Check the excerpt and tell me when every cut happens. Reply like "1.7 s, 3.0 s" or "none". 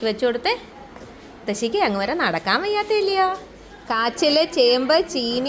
none

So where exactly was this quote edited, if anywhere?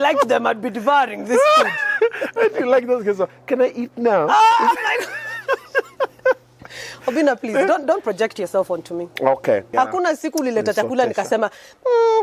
9.7 s

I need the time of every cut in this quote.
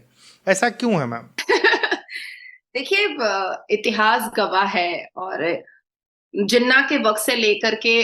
none

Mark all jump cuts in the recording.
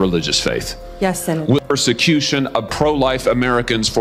1.6 s

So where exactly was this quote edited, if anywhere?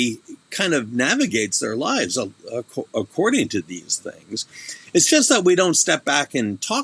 none

